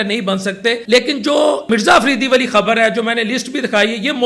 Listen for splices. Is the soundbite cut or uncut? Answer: cut